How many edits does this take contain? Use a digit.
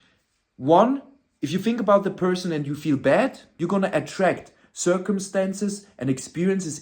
1